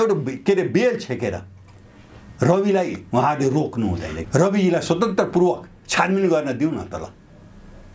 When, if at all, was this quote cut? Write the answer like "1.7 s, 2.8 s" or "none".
4.1 s

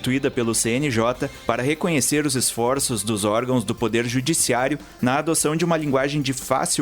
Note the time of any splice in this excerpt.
1.3 s

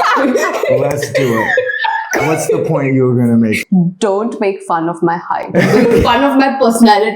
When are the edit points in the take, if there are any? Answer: 3.6 s

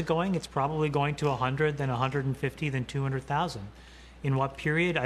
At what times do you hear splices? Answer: none

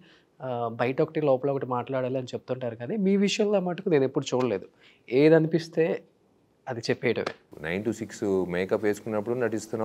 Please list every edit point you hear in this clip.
7.5 s

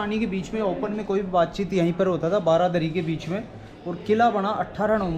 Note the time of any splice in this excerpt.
none

